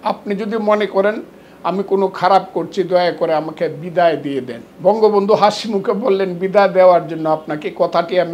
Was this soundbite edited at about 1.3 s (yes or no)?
no